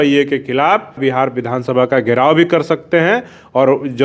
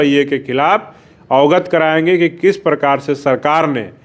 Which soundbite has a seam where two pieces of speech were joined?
first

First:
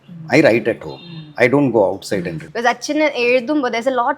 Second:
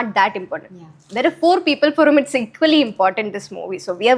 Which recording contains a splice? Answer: first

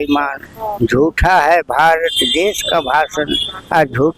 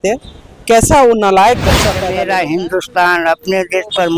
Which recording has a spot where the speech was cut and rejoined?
second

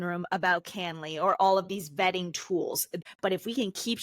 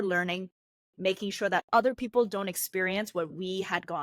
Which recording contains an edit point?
first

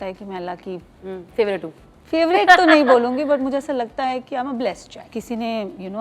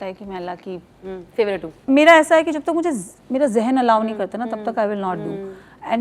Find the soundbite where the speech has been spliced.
second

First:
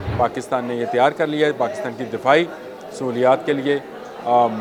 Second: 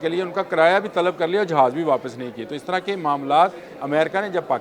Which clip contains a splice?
second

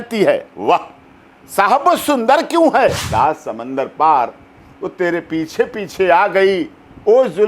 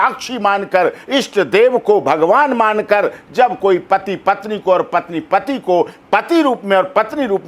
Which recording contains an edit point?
first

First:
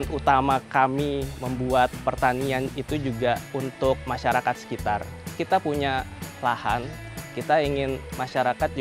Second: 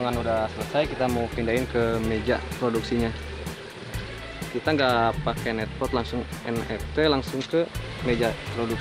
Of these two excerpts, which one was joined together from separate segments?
first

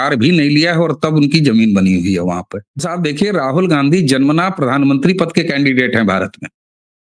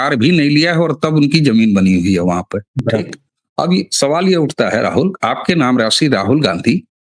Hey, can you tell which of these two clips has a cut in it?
first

